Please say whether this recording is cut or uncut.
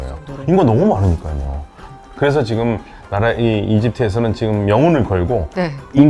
cut